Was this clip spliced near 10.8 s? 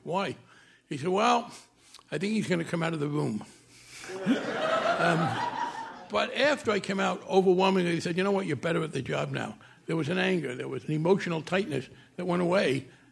yes; 2 cuts; at 6.6 s, 10.8 s

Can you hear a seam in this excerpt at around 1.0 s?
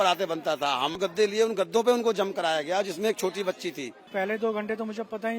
yes; 2 cuts; at 1.0 s, 4.1 s

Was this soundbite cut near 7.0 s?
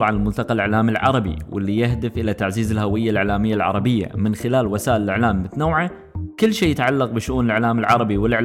no; 0 cuts

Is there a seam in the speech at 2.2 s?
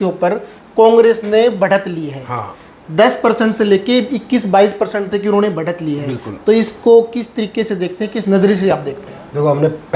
no; 0 cuts

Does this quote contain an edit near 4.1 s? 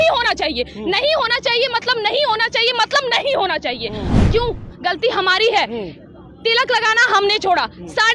yes; 1 cut; at 4.1 s

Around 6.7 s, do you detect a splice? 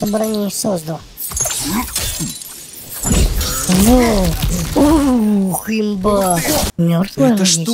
yes; 1 cut; at 6.7 s

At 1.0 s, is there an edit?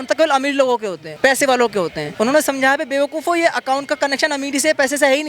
yes; 2 cuts; at 1.0 s, 2.0 s

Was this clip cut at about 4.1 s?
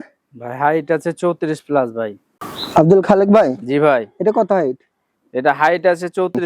no; 1 cut; at 2.2 s

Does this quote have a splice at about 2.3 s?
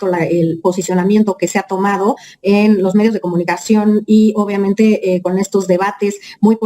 no; 0 cuts

